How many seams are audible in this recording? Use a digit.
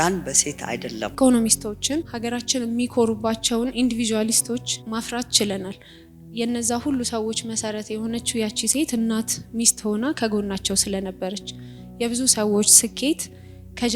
3